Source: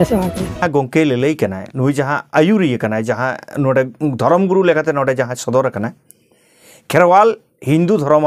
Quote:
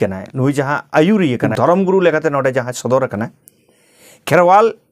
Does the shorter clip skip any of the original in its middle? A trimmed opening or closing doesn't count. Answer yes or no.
yes